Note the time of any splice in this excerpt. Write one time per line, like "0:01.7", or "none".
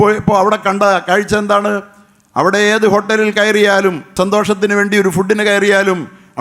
0:04.1